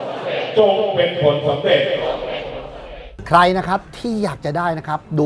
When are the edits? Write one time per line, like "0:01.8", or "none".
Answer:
0:03.1